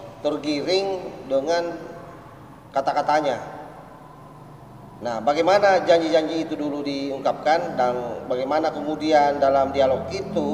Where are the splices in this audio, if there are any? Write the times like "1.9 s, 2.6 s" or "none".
none